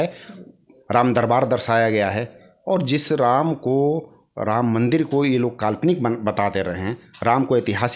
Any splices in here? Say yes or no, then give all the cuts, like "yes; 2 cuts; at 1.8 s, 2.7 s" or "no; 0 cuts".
no; 0 cuts